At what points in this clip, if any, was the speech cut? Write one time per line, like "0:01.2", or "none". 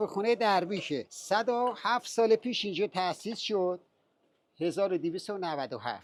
none